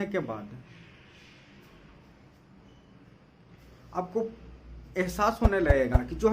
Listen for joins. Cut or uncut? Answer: uncut